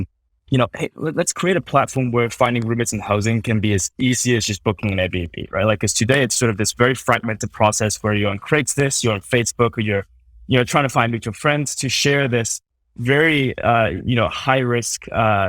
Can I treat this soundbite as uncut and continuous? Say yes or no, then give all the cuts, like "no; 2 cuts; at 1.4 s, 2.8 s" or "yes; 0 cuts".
yes; 0 cuts